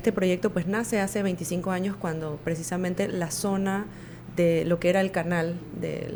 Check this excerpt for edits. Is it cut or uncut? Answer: uncut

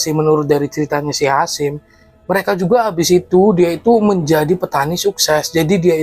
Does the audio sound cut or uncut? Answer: uncut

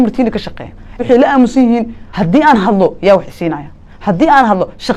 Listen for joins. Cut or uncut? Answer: cut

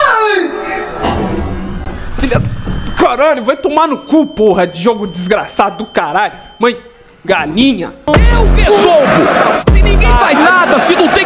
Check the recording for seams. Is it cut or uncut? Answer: cut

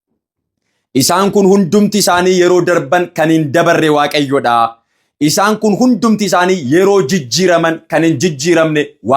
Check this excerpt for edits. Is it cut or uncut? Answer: uncut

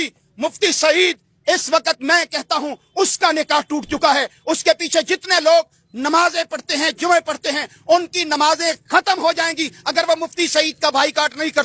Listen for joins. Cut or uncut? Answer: uncut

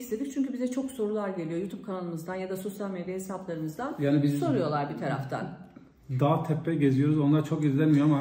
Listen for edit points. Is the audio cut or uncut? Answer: uncut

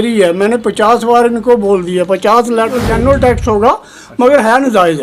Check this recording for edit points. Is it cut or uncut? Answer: cut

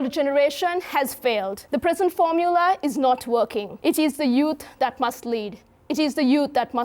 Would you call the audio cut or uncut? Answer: cut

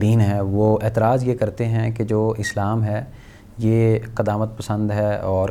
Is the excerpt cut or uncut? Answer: uncut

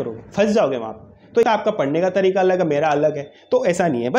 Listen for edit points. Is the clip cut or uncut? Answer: cut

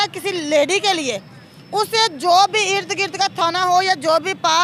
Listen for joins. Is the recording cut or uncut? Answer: uncut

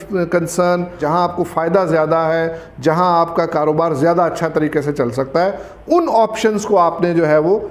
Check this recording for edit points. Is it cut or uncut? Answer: cut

